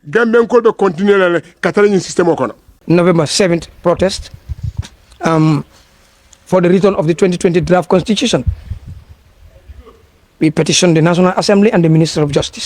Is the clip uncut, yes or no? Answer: no